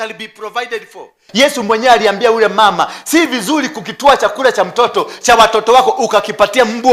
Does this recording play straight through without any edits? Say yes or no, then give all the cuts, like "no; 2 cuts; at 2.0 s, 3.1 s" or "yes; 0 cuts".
no; 1 cut; at 1.2 s